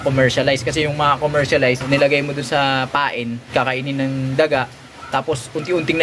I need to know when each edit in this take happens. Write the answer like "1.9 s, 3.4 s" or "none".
1.8 s, 3.5 s